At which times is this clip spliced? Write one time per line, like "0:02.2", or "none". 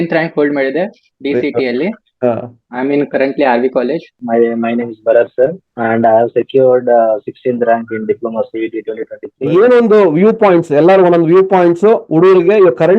0:02.6
0:04.2
0:05.7
0:09.3